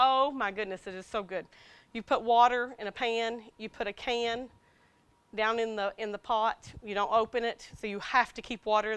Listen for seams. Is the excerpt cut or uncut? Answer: cut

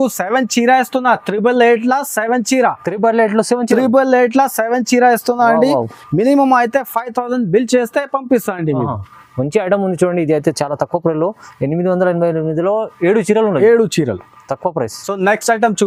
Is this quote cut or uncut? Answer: uncut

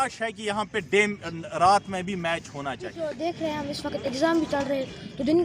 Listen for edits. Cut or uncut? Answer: cut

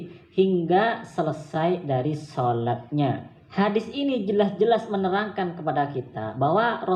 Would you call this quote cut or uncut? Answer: cut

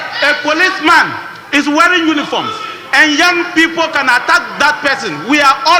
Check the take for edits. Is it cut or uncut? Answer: uncut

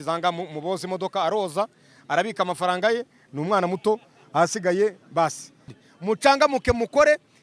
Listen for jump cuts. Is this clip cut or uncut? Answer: cut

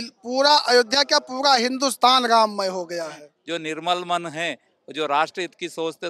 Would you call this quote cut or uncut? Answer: cut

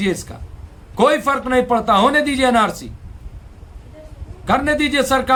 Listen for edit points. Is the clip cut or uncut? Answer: uncut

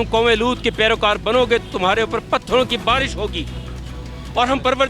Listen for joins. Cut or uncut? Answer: uncut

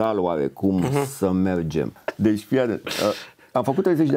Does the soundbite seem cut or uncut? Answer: cut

